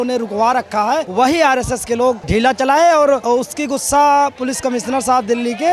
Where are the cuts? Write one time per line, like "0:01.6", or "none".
none